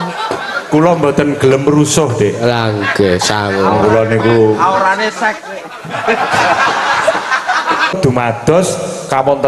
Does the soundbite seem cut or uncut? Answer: cut